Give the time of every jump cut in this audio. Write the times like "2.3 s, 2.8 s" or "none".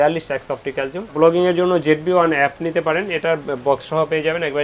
1.1 s